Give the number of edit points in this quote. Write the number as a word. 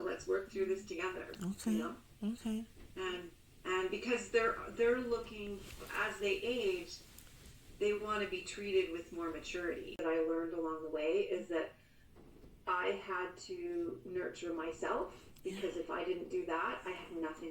one